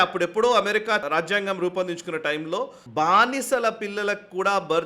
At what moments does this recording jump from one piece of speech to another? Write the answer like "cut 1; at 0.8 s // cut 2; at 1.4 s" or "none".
cut 1; at 1.0 s // cut 2; at 2.8 s